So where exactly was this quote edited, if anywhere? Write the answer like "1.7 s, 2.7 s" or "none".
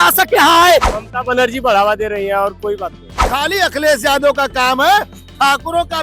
0.9 s, 3.3 s